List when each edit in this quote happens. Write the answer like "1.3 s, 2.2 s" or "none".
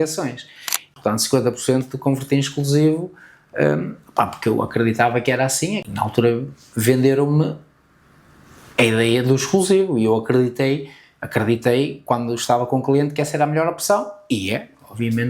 0.9 s, 5.8 s